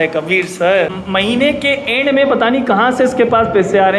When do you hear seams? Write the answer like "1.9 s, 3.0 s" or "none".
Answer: 1.0 s